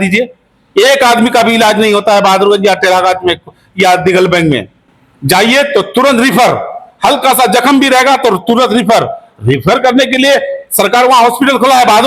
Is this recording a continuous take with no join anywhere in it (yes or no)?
yes